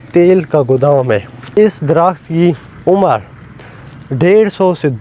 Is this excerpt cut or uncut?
cut